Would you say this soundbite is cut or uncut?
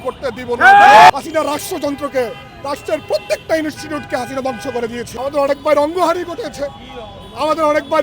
cut